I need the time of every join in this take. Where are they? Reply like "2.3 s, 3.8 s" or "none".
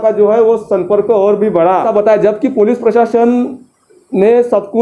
1.9 s